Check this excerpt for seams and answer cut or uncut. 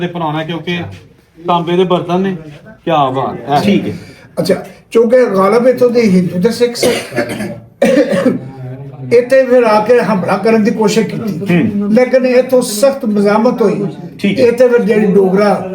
cut